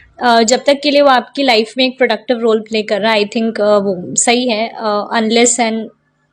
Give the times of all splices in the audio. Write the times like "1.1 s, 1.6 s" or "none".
none